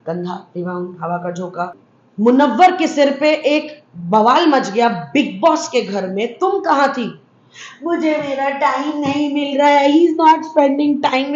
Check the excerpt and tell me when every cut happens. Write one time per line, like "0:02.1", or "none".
0:01.8